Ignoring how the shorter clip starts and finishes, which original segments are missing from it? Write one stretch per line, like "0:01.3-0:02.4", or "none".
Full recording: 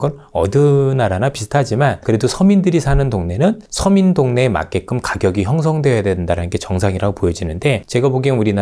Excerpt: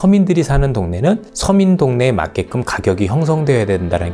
none